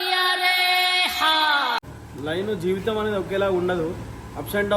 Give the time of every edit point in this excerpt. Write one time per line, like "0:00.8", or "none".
0:01.9